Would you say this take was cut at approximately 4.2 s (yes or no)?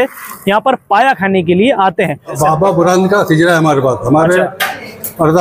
no